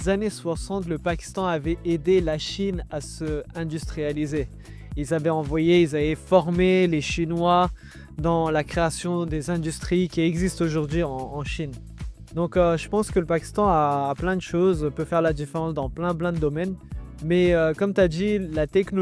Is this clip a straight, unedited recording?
yes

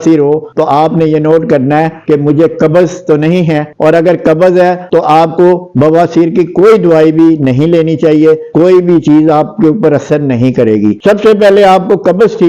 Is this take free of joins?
yes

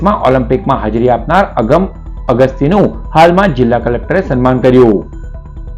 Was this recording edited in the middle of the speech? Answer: no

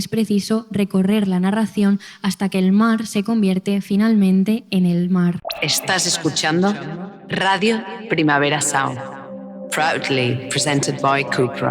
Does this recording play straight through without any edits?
no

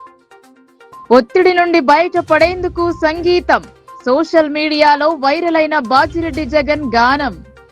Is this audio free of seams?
no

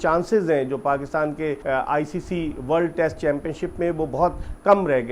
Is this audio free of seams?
no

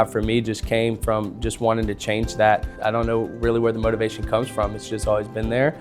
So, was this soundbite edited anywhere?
yes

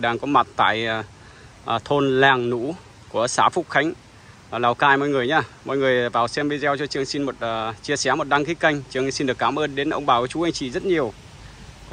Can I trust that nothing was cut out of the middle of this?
yes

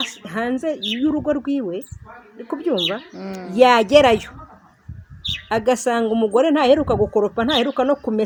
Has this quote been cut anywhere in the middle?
no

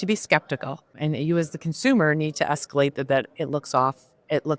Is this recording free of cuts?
no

